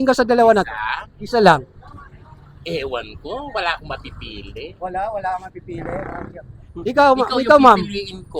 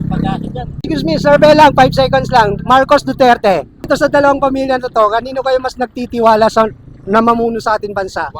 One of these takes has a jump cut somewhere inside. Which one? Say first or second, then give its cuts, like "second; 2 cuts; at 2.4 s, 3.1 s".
second; 2 cuts; at 0.8 s, 3.9 s